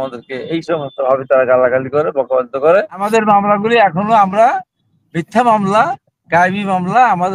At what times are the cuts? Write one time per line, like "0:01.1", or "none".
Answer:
0:03.0